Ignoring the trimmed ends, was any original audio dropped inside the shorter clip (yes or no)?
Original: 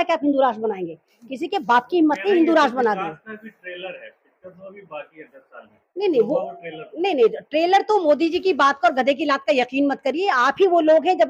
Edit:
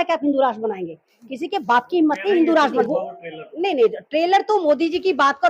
yes